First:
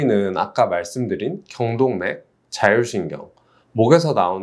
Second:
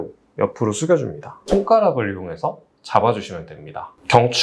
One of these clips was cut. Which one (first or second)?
second